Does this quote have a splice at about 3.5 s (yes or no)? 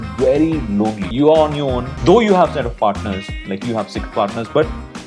no